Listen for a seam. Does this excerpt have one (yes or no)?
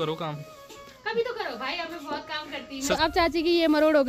yes